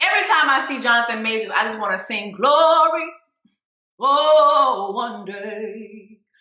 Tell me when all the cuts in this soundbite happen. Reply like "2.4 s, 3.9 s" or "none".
none